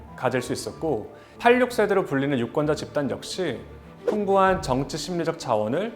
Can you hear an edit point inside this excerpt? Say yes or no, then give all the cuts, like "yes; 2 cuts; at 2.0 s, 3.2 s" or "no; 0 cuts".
yes; 1 cut; at 1.2 s